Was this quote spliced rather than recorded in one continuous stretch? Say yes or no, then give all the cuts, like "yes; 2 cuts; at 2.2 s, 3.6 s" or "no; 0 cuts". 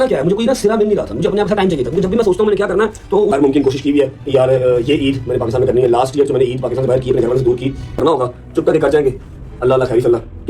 yes; 2 cuts; at 3.3 s, 8.0 s